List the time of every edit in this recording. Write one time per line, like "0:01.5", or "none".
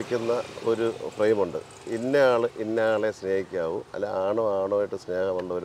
0:03.9